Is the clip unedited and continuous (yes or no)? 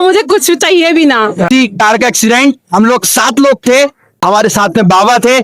no